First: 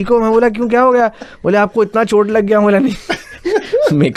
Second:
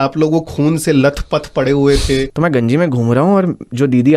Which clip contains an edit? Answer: second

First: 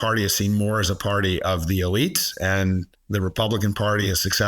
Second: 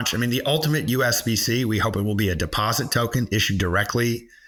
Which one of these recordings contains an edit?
first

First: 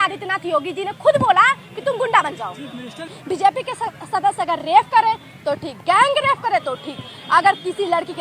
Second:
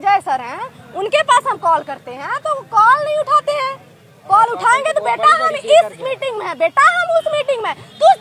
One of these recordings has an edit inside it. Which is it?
first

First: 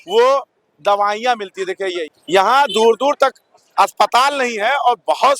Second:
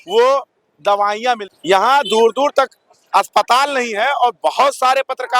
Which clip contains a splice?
second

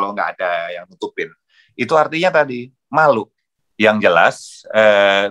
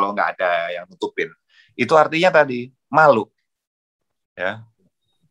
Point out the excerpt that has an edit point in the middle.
first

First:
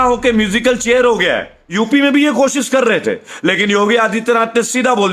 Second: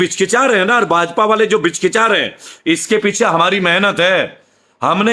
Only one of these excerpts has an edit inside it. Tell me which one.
first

